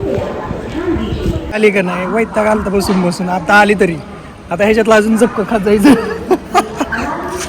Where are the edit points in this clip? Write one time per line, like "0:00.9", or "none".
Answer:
0:01.6